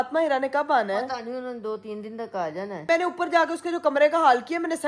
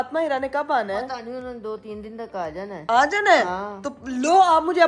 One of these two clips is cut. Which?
first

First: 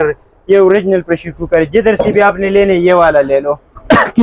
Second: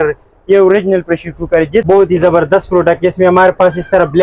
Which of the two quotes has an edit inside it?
second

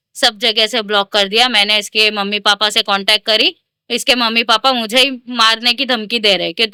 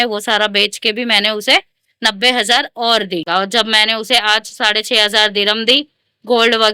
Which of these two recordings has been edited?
second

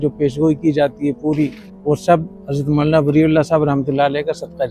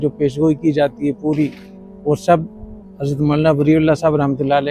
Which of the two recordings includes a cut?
first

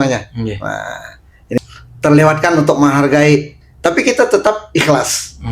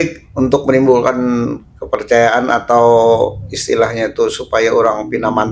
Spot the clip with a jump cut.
first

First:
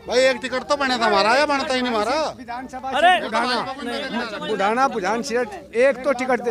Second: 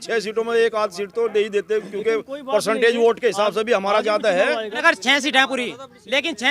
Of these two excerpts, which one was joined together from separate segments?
second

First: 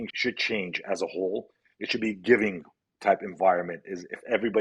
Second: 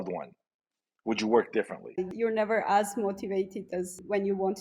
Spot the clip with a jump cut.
second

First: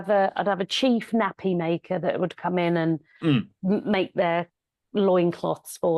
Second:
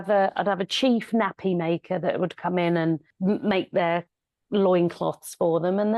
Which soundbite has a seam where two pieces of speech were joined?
second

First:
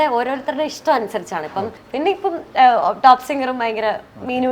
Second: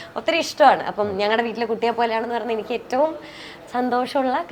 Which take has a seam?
first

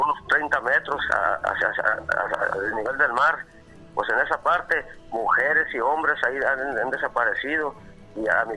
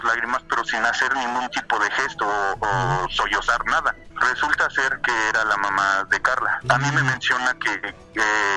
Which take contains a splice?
second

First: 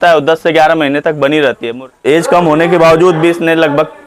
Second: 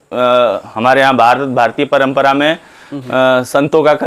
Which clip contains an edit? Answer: first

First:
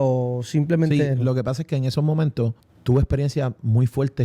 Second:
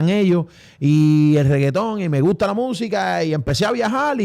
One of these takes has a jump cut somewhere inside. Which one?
first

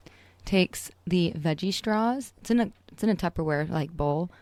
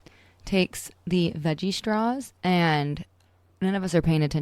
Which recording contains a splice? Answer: second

